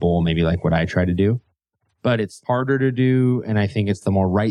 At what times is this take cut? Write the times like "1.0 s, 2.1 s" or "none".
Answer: 2.4 s